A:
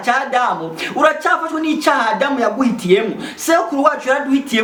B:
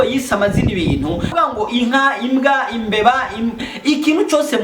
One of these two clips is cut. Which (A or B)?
B